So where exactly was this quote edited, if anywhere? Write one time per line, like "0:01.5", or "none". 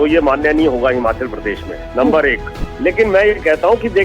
0:02.6